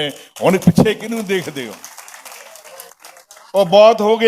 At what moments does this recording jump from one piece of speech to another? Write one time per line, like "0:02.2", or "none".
none